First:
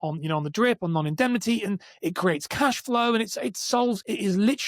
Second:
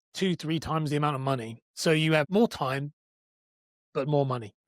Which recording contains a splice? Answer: second; 1 cut; at 2.3 s

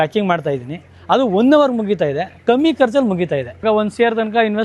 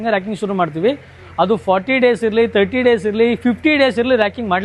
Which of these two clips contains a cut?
first; 1 cut; at 3.6 s

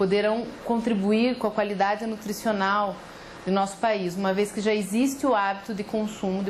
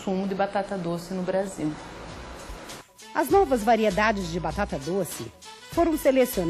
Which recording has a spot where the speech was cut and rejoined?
first; 1 cut; at 1.5 s

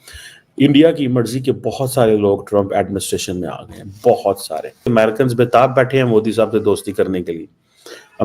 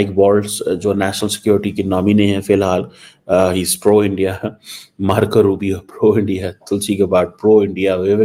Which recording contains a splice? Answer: first; 1 cut; at 4.7 s

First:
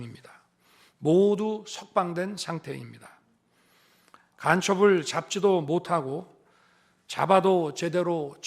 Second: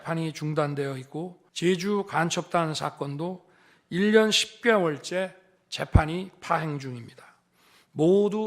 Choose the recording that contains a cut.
second; 1 cut; at 1.4 s

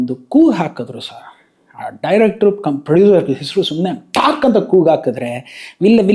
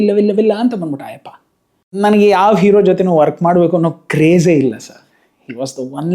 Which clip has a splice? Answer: second; 1 cut; at 1.9 s

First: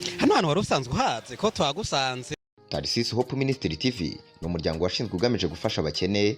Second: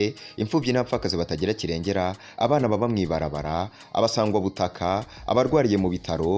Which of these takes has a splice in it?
first; 1 cut; at 2.3 s

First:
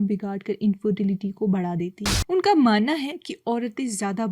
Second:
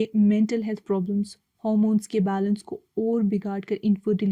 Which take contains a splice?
first; 1 cut; at 2.2 s

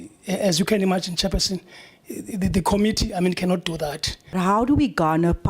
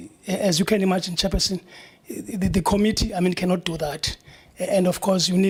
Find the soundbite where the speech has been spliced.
first; 1 cut; at 4.3 s

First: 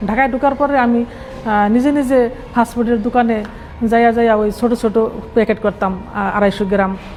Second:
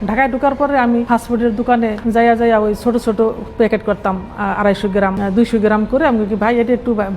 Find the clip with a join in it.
second; 3 cuts; at 1.1 s, 2.0 s, 5.2 s

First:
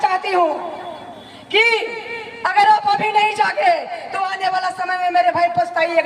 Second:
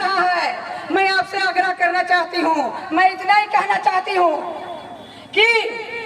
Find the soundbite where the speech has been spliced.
second; 1 cut; at 2.8 s

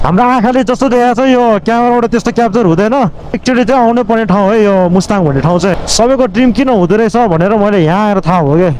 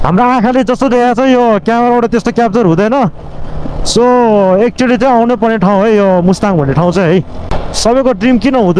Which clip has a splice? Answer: first; 2 cuts; at 3.4 s, 5.7 s

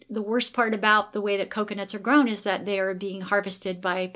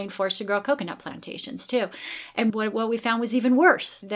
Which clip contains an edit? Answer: second; 1 cut; at 2.5 s

